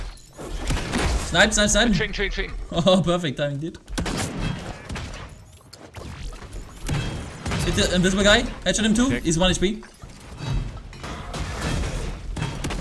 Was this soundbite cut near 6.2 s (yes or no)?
no